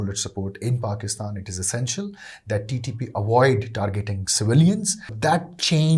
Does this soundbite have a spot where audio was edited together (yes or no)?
yes